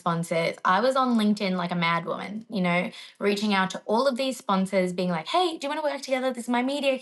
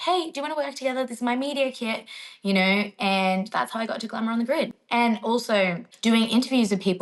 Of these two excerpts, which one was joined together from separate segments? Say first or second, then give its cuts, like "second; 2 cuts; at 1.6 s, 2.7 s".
second; 1 cut; at 5.9 s